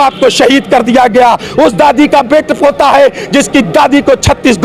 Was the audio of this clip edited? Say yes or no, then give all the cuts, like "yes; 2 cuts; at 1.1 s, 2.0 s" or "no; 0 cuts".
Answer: no; 0 cuts